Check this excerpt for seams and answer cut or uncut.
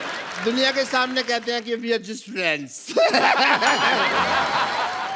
uncut